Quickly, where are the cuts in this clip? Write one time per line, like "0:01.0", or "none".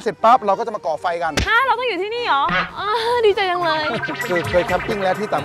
0:01.4
0:02.6
0:04.2